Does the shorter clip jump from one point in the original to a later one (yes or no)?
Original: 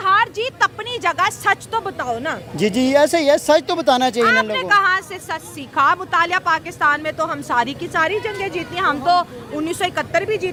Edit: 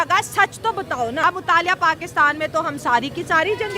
yes